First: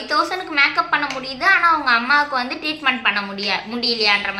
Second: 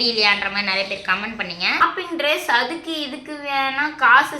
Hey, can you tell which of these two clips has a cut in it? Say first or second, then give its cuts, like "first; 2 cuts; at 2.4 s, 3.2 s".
second; 1 cut; at 1.8 s